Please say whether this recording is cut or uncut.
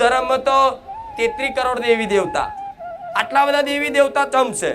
cut